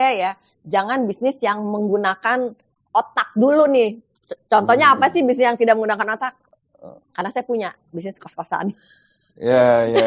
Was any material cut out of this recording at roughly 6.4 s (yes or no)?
no